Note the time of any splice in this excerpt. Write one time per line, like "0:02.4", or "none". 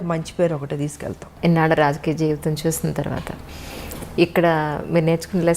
0:01.2